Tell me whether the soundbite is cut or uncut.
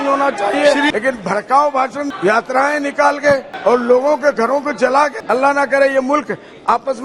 cut